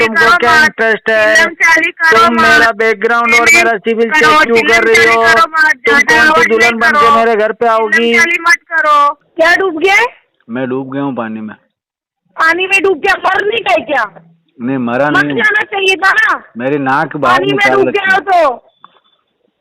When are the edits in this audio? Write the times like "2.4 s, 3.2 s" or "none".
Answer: 9.2 s